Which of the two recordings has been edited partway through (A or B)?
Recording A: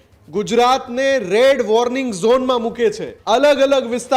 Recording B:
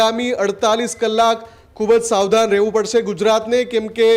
A